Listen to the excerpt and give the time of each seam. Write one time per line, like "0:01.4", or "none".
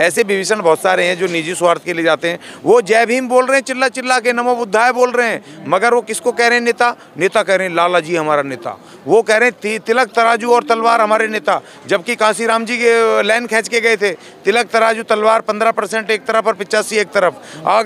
none